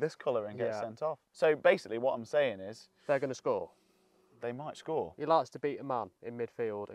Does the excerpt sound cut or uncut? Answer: cut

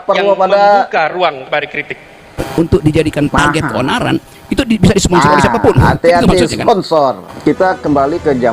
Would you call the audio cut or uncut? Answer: cut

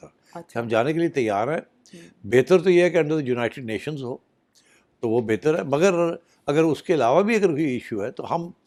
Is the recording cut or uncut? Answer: uncut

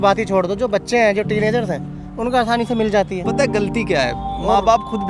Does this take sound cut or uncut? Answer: uncut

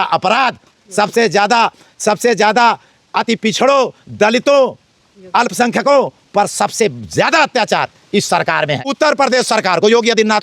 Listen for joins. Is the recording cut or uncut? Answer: cut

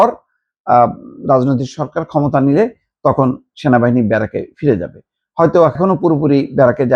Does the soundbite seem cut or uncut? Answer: cut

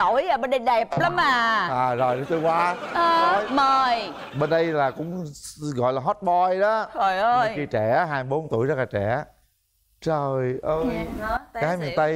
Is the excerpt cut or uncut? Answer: uncut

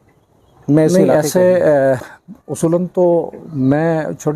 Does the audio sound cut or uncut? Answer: cut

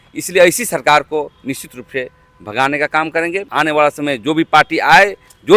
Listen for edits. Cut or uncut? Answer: cut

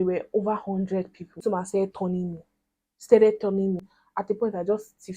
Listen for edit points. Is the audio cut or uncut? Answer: cut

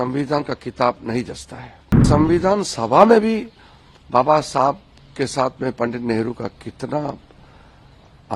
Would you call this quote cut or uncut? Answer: cut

